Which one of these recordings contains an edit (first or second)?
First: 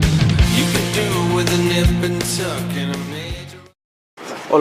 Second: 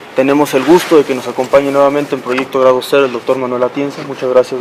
first